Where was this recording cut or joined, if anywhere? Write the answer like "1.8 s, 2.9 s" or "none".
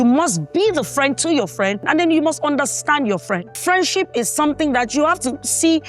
1.8 s, 3.6 s